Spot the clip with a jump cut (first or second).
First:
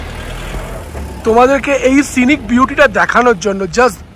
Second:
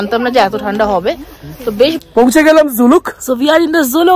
second